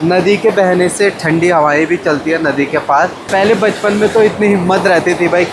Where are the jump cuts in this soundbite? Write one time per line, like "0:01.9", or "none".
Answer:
0:03.2